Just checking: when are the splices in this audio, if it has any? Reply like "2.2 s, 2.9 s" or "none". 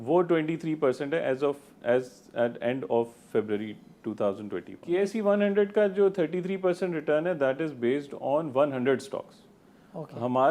4.7 s